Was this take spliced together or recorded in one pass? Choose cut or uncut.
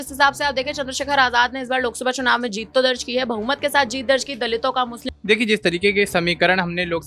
cut